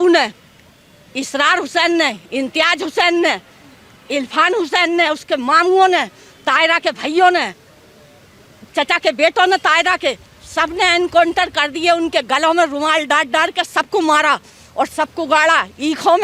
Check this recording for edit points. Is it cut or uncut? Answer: uncut